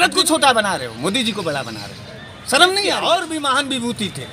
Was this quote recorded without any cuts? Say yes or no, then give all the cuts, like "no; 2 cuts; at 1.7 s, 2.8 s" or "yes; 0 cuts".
no; 1 cut; at 3.0 s